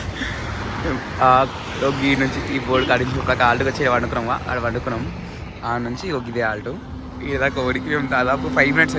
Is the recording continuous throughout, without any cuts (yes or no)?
yes